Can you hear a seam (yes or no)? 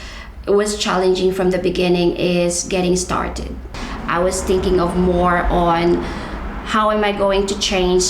yes